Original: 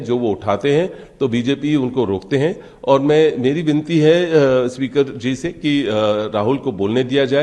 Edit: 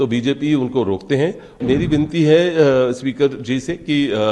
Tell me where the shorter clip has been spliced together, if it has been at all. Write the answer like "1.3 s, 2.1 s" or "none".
1.6 s

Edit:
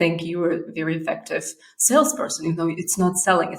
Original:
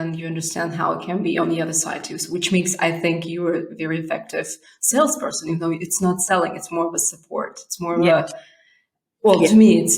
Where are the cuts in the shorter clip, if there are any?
none

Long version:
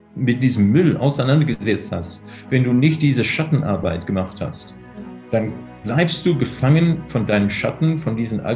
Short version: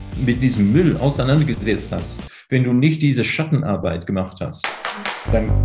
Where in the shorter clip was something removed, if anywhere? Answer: none

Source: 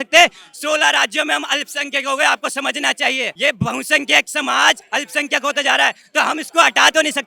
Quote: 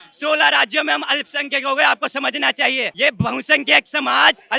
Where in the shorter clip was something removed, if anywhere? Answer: none

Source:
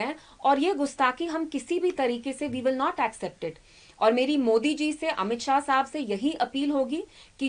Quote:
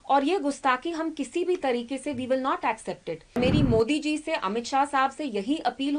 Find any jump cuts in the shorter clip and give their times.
3.4 s

